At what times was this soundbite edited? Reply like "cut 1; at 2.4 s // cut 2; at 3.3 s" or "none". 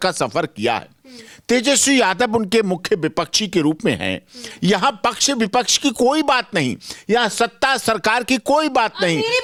none